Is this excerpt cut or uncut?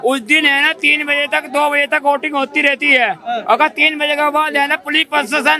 uncut